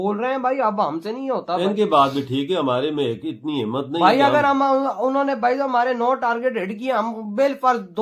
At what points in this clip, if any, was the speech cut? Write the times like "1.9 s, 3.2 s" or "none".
none